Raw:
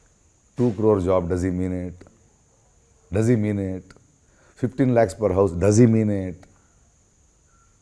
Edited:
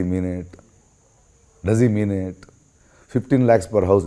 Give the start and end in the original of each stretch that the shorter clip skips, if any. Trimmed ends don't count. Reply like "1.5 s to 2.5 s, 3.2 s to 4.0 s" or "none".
none